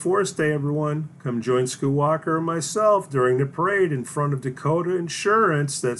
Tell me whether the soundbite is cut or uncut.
uncut